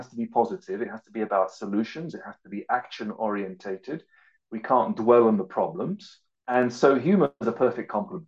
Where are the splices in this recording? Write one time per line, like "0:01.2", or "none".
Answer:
none